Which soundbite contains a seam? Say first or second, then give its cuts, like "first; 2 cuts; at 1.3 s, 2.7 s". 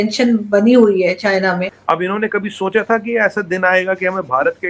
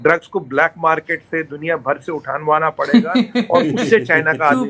first; 1 cut; at 1.8 s